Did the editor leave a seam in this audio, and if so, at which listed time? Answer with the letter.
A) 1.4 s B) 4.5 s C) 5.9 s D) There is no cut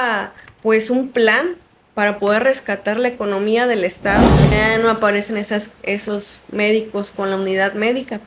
B